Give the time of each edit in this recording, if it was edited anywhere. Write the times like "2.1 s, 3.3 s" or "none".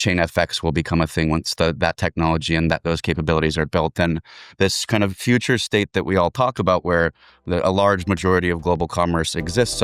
none